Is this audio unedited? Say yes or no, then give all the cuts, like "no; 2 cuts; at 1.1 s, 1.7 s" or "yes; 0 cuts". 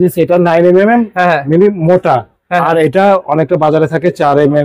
yes; 0 cuts